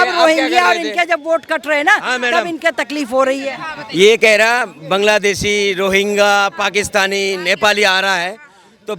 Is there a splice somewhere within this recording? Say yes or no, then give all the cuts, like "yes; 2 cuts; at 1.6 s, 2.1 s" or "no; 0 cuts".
no; 0 cuts